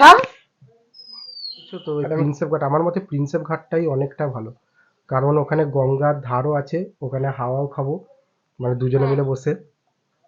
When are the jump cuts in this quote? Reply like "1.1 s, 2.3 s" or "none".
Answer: 1.8 s

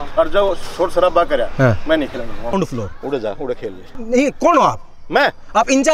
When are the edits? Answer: 2.6 s, 3.9 s

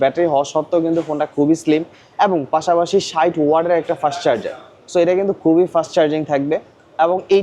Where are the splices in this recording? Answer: none

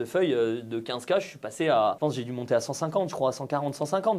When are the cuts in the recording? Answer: none

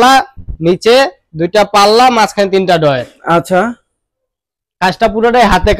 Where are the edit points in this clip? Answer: none

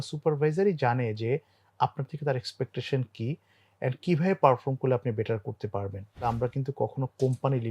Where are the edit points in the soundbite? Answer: 6.3 s

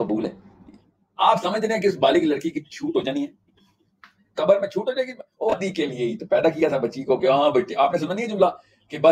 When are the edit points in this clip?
5.5 s

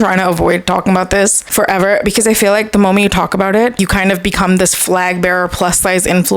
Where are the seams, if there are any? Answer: 1.4 s, 3.8 s

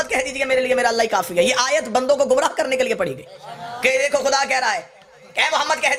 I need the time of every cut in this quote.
none

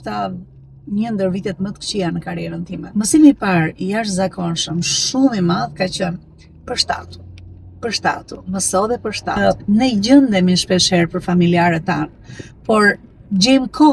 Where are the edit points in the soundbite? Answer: 2.8 s, 9.4 s

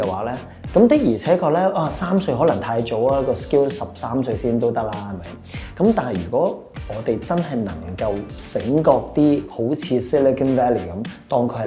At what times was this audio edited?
none

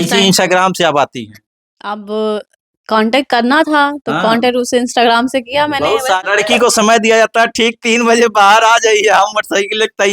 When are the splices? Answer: 6.2 s

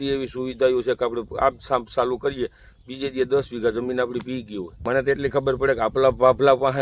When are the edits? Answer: 4.8 s

